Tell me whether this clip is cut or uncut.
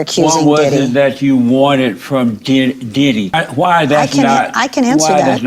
cut